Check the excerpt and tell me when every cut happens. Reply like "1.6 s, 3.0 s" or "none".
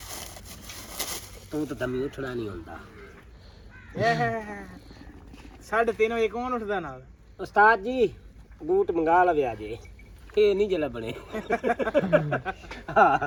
none